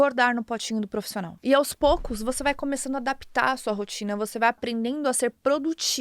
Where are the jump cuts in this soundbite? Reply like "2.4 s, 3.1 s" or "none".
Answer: 1.2 s, 4.6 s